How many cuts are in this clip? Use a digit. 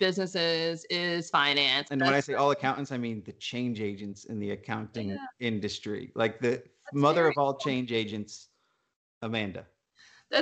1